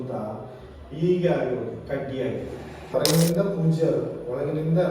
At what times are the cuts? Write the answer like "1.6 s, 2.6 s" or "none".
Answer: 2.9 s